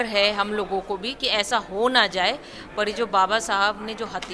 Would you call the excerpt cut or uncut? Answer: uncut